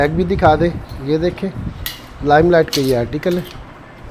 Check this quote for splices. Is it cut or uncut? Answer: uncut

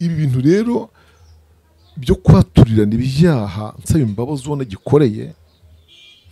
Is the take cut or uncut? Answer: uncut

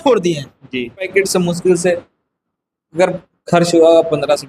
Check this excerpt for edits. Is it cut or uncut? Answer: cut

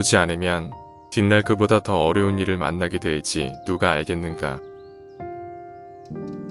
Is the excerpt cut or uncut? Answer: cut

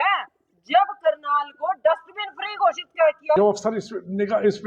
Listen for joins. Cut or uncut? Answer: cut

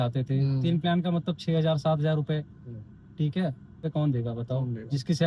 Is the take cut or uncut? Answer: uncut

